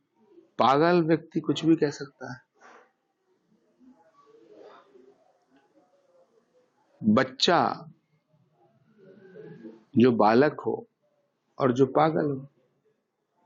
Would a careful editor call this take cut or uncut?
uncut